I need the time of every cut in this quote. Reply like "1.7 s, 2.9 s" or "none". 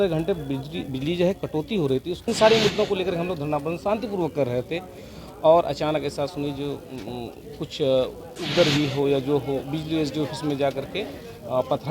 2.2 s